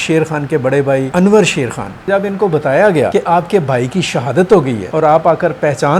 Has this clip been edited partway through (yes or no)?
yes